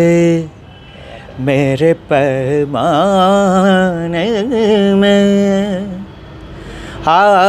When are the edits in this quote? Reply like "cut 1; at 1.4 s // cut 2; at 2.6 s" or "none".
none